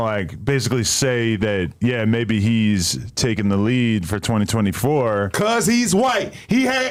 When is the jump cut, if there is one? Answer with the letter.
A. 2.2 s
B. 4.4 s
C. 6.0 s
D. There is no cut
D